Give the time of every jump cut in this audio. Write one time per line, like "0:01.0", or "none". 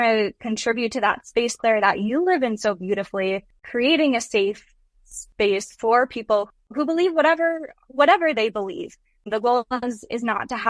0:06.5